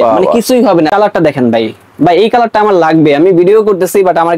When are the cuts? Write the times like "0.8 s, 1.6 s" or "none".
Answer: 0.9 s